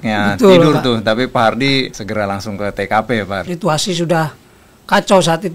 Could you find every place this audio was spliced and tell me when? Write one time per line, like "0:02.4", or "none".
0:02.0
0:03.4